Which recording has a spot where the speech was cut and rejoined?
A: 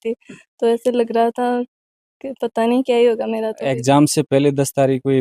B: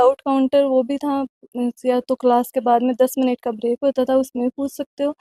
A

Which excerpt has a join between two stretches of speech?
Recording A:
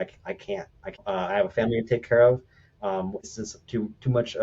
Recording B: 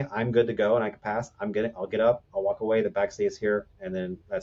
A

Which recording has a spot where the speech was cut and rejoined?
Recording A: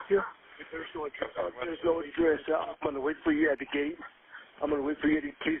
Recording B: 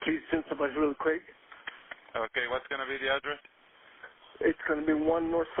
A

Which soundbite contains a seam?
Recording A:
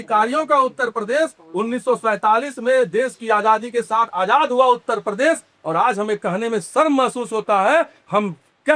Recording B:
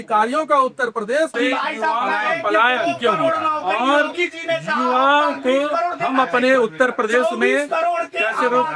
B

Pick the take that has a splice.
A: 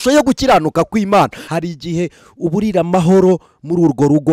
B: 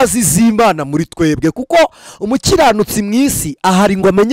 A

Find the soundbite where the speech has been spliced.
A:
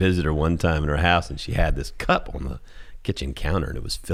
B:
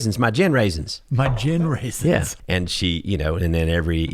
B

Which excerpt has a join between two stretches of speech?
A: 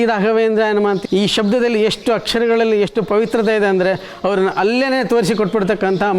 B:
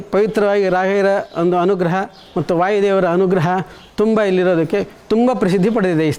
A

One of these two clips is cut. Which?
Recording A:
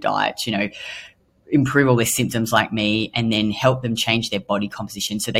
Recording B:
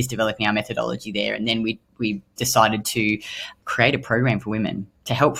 B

